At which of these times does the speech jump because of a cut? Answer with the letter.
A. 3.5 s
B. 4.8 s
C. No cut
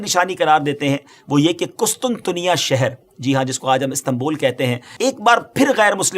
B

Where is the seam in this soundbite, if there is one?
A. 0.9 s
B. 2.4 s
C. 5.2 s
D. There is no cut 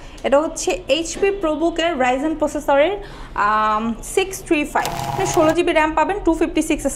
C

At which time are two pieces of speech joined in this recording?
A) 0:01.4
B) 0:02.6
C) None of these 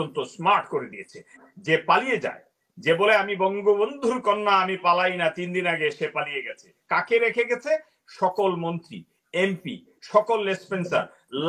A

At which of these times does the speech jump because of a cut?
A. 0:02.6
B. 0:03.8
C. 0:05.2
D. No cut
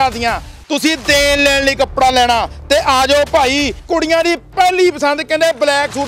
B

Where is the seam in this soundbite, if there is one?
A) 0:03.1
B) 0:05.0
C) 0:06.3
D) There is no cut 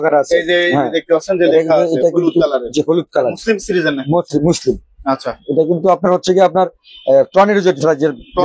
D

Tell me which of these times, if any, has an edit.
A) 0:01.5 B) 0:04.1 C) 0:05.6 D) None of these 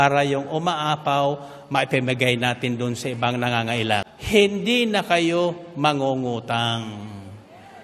B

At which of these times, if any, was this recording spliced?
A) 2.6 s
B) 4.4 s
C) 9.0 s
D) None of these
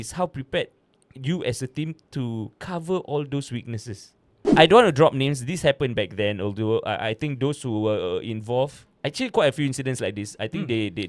B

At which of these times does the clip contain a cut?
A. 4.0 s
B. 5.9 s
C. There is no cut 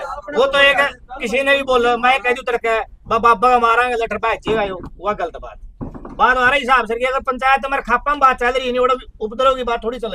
C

